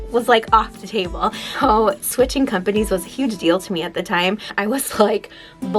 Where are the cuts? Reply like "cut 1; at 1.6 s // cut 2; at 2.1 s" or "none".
cut 1; at 1.5 s // cut 2; at 4.5 s